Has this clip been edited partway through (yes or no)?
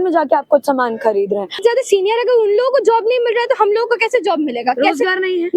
yes